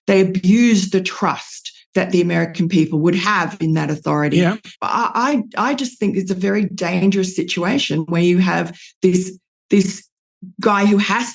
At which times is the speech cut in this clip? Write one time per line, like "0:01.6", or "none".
0:04.7